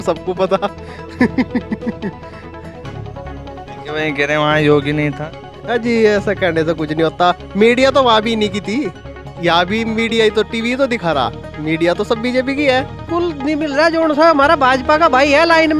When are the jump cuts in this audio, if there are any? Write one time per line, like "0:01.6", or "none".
0:13.1